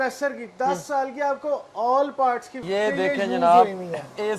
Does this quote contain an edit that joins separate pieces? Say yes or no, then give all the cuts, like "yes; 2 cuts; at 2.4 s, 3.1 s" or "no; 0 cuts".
yes; 1 cut; at 2.5 s